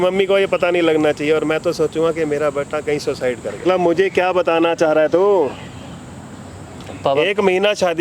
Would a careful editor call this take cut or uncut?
cut